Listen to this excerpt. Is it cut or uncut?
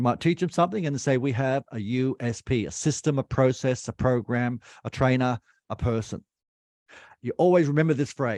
uncut